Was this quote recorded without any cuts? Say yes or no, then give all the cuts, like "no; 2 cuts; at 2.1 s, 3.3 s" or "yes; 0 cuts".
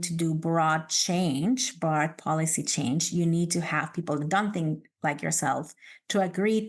yes; 0 cuts